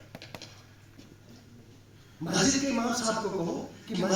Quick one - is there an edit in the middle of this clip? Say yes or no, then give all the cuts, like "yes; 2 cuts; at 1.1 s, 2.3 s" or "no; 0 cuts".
yes; 1 cut; at 0.9 s